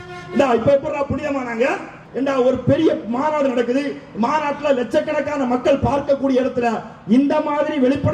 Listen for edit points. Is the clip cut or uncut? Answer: cut